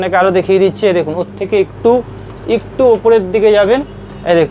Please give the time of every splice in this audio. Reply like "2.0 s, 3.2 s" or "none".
none